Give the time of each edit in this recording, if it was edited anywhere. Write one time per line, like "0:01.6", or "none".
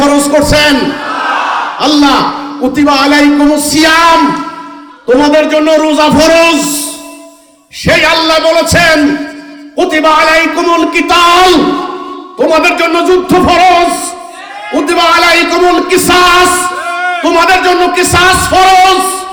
none